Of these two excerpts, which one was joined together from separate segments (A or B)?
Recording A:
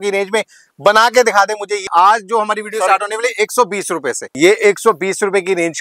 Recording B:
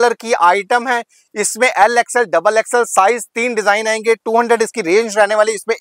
A